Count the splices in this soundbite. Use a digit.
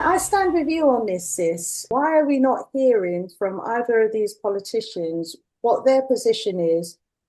2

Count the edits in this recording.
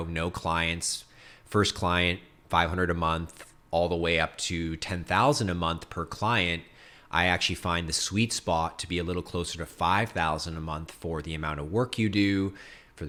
0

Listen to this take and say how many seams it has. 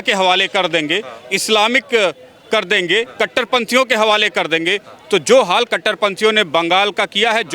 0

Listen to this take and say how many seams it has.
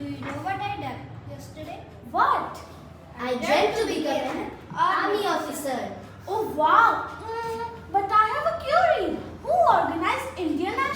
0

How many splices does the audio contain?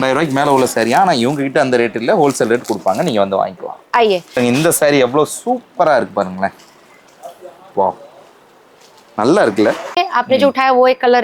2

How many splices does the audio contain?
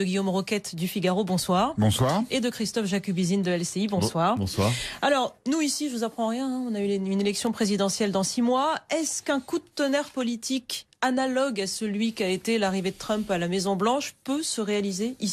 0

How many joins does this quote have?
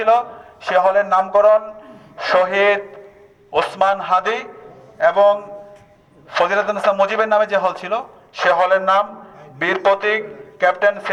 0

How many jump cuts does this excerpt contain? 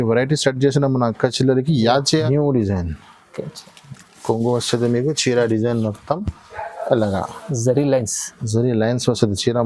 1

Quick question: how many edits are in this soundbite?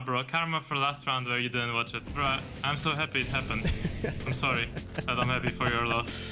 1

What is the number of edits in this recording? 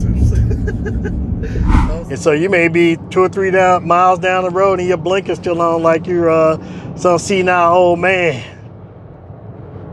1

